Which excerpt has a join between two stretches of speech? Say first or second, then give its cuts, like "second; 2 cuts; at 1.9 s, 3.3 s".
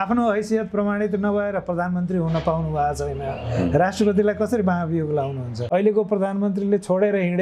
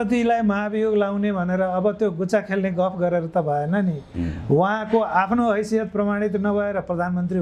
first; 1 cut; at 5.5 s